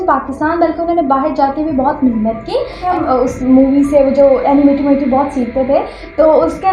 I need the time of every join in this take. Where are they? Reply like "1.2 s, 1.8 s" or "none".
2.8 s

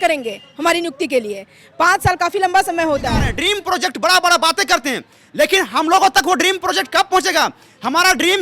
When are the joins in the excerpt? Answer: 3.3 s

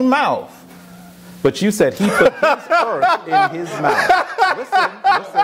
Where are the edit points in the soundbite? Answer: none

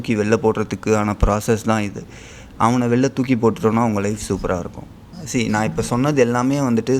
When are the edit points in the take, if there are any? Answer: 5.1 s

